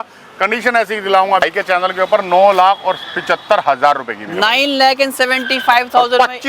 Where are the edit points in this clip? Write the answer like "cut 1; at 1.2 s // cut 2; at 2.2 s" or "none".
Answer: cut 1; at 1.4 s